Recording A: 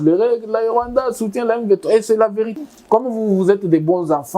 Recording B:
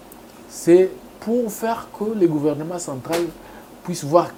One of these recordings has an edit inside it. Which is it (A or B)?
A